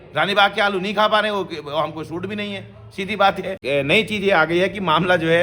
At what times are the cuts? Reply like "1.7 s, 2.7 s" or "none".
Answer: 3.6 s